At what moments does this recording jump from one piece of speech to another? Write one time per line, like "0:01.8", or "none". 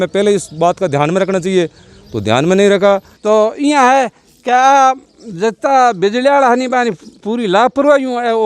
0:03.1